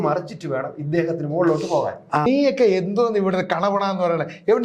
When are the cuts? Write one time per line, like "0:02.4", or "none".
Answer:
0:02.3